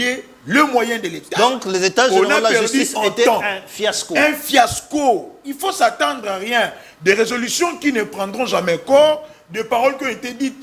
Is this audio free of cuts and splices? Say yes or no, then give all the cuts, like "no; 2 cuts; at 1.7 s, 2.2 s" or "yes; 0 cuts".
yes; 0 cuts